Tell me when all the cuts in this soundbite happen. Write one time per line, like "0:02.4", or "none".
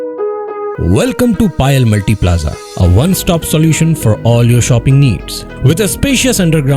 none